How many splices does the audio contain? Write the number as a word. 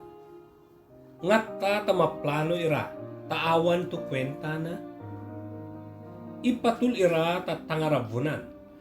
two